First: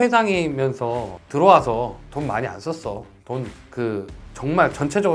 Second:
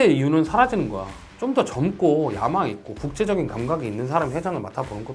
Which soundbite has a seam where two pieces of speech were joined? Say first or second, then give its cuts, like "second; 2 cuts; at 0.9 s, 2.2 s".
second; 1 cut; at 1.2 s